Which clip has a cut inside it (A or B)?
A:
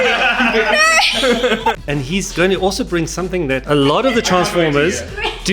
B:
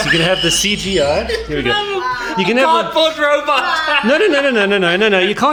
A